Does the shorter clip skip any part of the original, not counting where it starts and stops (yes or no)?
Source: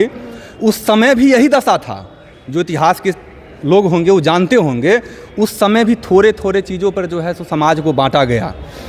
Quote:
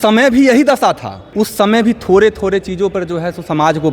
yes